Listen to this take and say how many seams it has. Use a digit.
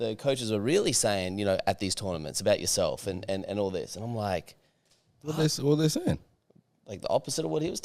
0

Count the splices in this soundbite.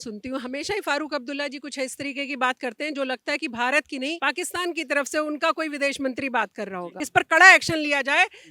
2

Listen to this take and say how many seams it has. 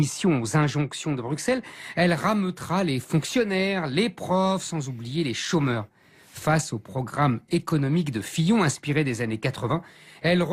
1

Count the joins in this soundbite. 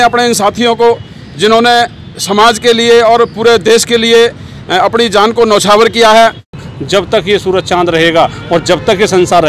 1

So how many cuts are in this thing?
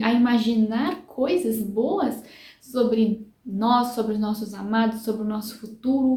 0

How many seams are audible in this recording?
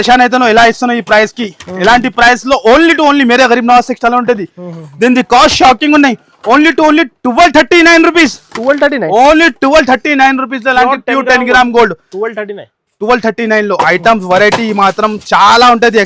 0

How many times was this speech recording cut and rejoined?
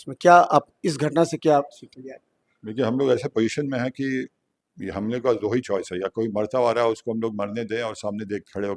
0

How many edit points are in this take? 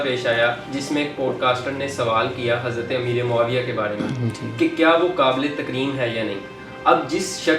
0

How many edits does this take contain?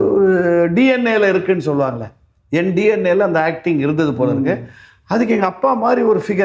0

